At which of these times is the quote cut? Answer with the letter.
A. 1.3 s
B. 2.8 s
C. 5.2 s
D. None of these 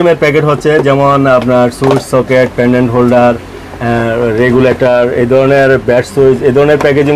D